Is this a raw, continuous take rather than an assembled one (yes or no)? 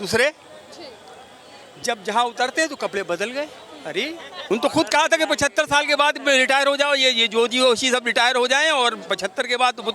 no